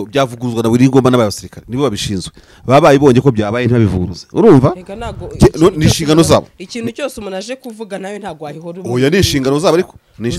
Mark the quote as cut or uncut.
uncut